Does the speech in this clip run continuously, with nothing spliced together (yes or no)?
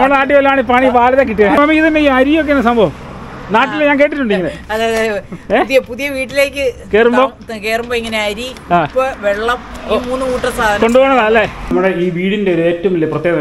no